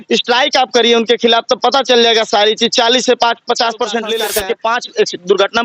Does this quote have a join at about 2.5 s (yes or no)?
no